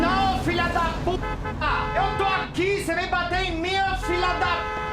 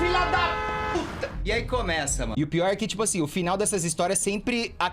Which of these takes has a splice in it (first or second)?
second